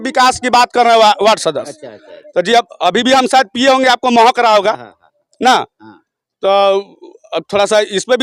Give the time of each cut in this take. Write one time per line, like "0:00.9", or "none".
none